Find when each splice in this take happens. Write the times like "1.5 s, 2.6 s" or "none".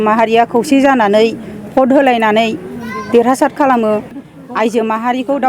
4.2 s